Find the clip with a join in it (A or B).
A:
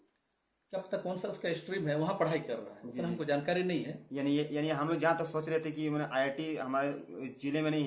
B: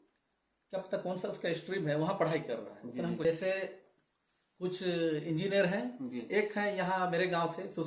B